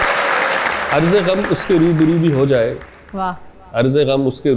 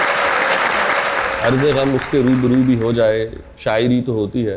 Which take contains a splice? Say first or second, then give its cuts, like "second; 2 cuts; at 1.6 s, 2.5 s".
second; 1 cut; at 0.9 s